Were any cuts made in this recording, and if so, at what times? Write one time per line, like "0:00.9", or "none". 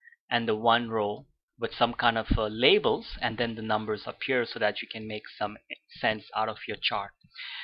0:05.1